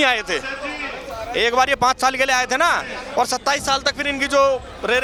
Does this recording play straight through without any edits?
yes; 0 cuts

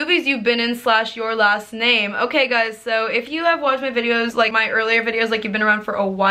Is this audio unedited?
yes; 0 cuts

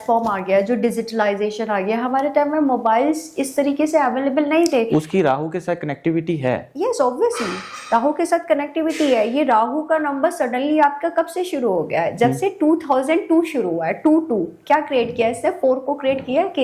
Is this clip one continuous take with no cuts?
yes; 0 cuts

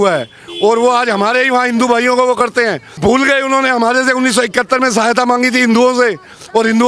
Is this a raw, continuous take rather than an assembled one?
no; 1 cut; at 3.0 s

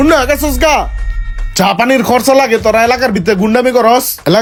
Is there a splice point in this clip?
no; 0 cuts

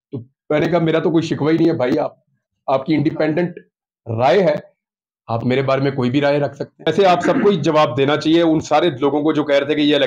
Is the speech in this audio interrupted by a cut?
yes; 1 cut; at 6.8 s

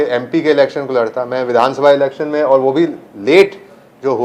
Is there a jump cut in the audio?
no; 0 cuts

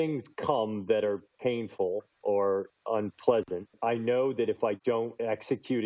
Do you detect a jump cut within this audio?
yes; 3 cuts; at 2.1 s, 2.7 s, 4.9 s

